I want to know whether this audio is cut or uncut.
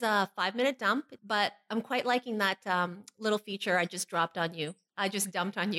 cut